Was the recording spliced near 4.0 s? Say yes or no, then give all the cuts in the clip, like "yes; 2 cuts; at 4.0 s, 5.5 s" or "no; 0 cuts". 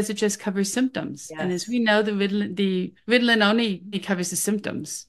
yes; 2 cuts; at 2.9 s, 4.0 s